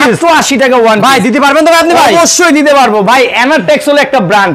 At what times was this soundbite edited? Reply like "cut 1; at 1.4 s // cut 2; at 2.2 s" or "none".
none